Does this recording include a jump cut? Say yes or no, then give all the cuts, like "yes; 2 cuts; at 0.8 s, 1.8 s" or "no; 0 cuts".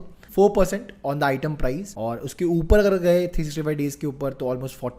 yes; 1 cut; at 1.9 s